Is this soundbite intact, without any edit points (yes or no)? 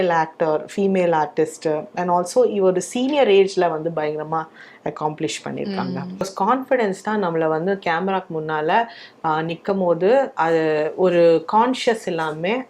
no